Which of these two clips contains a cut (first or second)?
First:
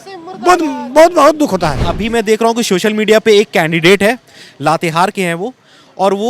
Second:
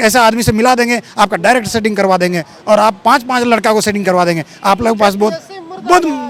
first